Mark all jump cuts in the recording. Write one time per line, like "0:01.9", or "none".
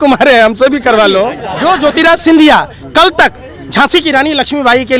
0:01.4